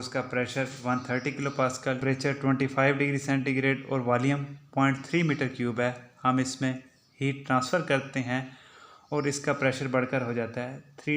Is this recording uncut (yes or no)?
no